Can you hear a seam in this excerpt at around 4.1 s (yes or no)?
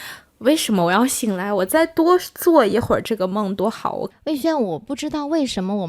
yes